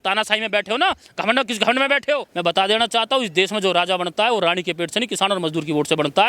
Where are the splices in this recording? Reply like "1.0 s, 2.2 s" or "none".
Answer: 2.3 s